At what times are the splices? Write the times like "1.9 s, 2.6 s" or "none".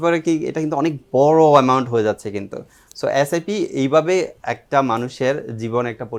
none